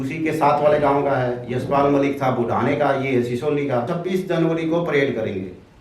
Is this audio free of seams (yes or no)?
no